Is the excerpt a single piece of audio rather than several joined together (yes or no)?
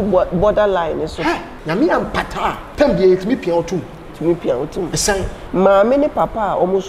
no